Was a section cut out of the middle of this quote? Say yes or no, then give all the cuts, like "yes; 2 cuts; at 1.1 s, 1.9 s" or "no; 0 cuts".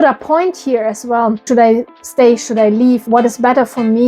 yes; 2 cuts; at 1.4 s, 3.0 s